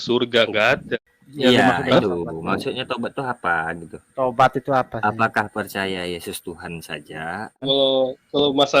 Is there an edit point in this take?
yes; 2 cuts; at 0.9 s, 7.7 s

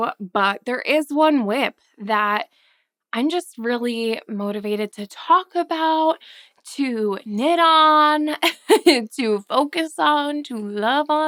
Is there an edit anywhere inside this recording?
no; 0 cuts

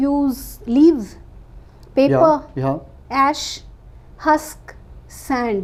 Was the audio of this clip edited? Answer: no; 0 cuts

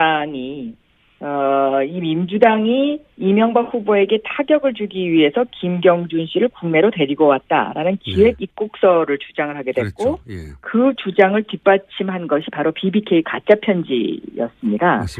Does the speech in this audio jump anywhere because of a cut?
yes; 1 cut; at 3.8 s

